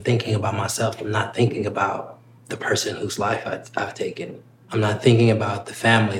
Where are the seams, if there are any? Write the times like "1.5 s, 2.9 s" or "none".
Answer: 2.3 s, 4.7 s